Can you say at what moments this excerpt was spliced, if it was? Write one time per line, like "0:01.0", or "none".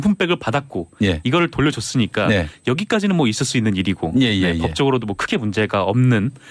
0:02.1